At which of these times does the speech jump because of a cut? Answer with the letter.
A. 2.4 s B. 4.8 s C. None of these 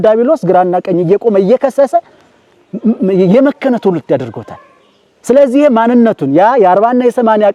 C